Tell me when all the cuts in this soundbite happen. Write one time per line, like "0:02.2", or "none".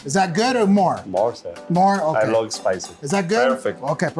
none